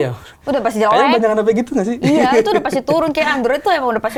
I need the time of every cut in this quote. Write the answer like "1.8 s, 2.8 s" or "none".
none